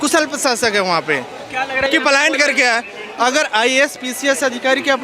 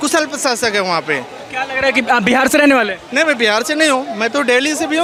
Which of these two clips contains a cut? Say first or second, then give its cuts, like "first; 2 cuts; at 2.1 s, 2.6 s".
first; 1 cut; at 1.8 s